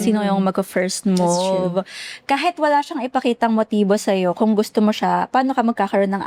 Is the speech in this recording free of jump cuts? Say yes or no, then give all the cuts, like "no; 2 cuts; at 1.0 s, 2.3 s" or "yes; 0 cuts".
yes; 0 cuts